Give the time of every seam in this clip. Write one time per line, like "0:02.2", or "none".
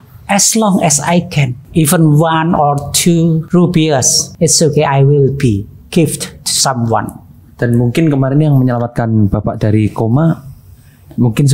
0:01.6
0:03.4
0:04.2